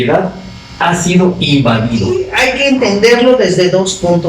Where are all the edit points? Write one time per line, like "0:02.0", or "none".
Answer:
0:02.3